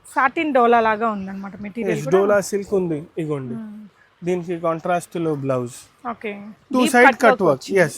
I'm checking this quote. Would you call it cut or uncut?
cut